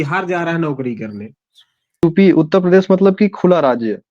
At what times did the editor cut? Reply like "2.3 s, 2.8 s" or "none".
2.0 s